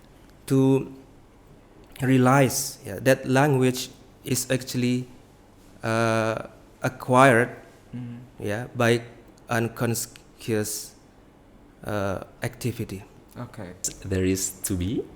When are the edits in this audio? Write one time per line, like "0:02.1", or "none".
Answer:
0:13.9